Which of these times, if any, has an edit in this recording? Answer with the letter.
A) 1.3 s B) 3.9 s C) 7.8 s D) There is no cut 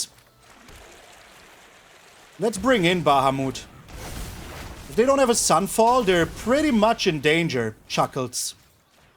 C